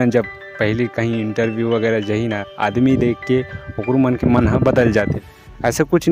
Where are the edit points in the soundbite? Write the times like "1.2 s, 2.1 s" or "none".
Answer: 5.1 s